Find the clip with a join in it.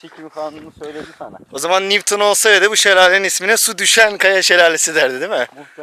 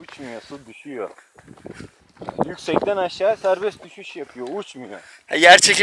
second; 1 cut; at 1.3 s

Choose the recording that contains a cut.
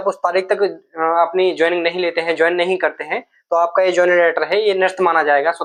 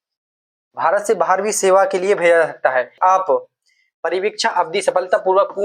second; 1 cut; at 2.9 s

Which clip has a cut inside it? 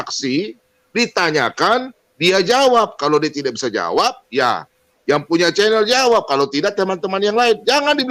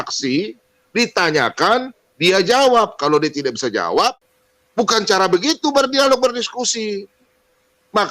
second; 1 cut; at 4.2 s

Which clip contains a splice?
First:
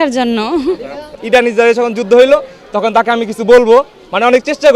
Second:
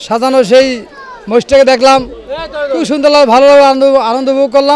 first; 1 cut; at 1.1 s

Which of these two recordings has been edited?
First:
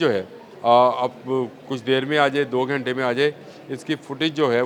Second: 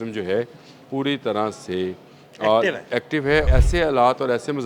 second; 1 cut; at 3.5 s

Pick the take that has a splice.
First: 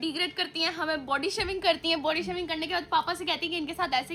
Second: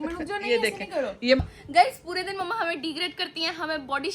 second; 1 cut; at 1.4 s

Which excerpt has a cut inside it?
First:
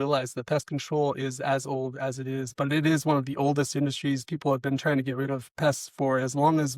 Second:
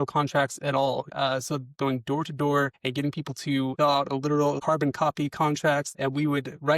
second; 4 cuts; at 1.3 s, 3.7 s, 4.6 s, 5.9 s

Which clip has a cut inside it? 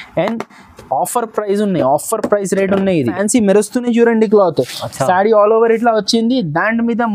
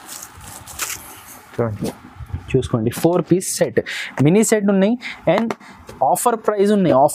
first; 1 cut; at 3.1 s

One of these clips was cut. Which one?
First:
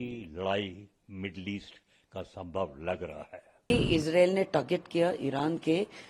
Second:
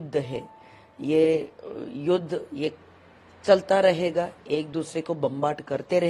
first; 1 cut; at 3.5 s

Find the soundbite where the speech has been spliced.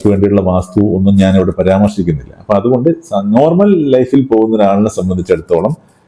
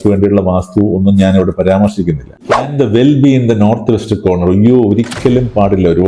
second; 1 cut; at 2.5 s

